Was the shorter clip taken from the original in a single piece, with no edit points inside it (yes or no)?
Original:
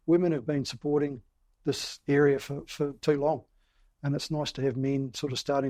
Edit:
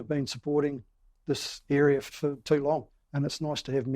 no